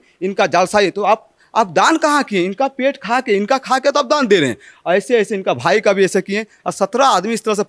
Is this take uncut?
yes; 0 cuts

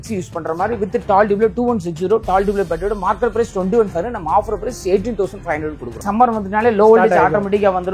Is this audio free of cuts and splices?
no; 1 cut; at 5.9 s

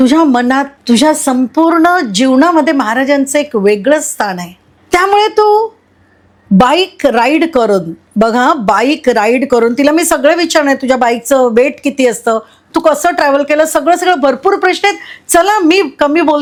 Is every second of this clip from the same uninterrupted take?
yes; 0 cuts

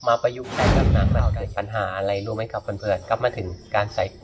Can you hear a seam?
yes; 1 cut; at 1.0 s

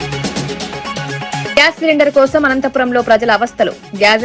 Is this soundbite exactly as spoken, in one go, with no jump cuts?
yes; 0 cuts

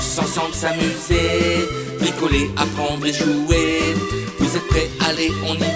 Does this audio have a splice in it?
no; 0 cuts

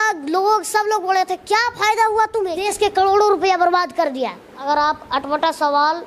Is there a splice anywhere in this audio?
yes; 2 cuts; at 2.6 s, 4.5 s

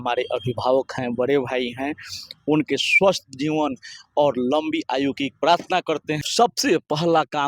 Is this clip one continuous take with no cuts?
no; 1 cut; at 6.2 s

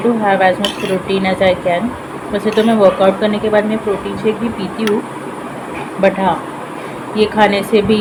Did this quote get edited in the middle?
no; 0 cuts

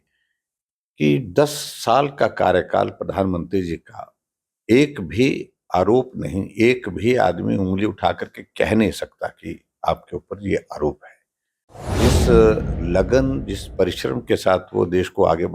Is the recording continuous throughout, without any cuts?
no; 1 cut; at 11.9 s

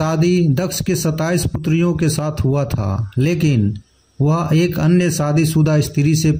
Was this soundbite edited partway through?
no; 0 cuts

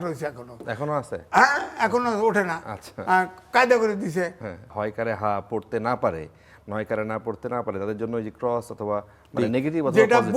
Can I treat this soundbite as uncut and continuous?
no; 1 cut; at 4.7 s

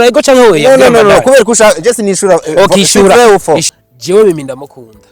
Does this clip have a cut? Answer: yes; 1 cut; at 3.7 s

